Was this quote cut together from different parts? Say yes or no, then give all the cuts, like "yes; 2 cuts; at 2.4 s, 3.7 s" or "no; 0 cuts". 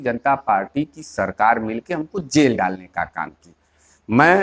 no; 0 cuts